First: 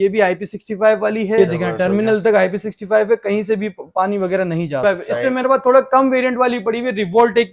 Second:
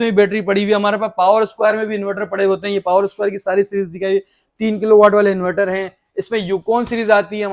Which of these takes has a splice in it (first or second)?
first